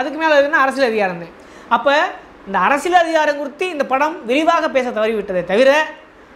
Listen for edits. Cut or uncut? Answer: uncut